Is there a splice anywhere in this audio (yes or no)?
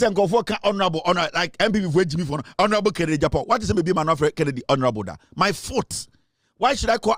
no